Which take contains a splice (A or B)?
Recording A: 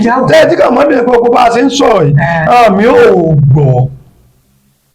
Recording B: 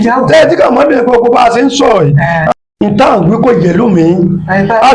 B